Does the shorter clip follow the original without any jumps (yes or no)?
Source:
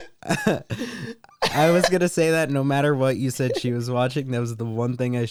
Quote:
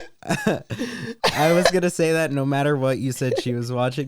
no